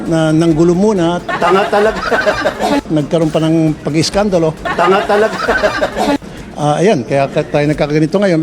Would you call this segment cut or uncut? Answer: cut